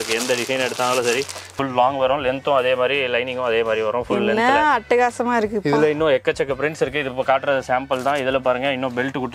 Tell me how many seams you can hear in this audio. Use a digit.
1